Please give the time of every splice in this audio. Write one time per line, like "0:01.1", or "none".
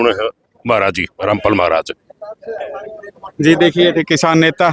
none